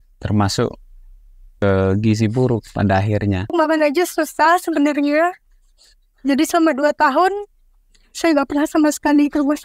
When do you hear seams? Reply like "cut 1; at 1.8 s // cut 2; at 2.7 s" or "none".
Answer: cut 1; at 3.5 s